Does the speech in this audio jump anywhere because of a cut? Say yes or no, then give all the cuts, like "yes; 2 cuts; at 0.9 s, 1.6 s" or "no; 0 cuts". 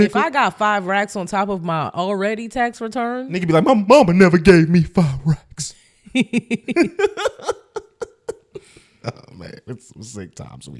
no; 0 cuts